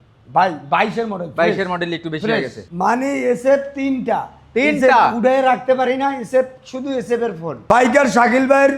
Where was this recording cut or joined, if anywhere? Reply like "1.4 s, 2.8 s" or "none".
2.6 s, 7.6 s